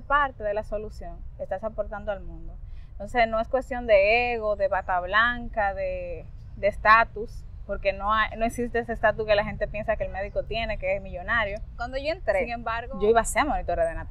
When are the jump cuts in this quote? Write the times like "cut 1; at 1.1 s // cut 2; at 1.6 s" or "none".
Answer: cut 1; at 11.8 s